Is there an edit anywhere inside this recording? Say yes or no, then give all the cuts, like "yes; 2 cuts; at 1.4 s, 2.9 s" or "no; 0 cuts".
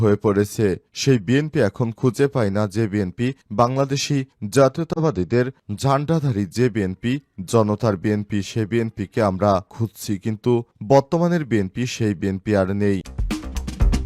yes; 1 cut; at 13.1 s